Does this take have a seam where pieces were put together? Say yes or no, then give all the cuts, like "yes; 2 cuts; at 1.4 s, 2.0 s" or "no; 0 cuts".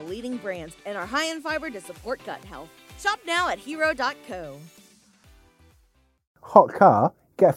yes; 1 cut; at 6.3 s